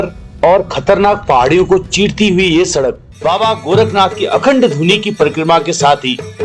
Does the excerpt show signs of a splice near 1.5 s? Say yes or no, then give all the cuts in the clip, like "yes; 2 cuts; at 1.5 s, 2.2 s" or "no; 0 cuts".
no; 1 cut; at 3.1 s